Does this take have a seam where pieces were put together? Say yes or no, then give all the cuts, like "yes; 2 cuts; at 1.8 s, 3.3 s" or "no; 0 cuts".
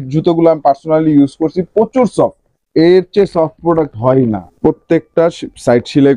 yes; 1 cut; at 4.5 s